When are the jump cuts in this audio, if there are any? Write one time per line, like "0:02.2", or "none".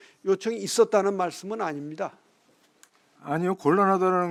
none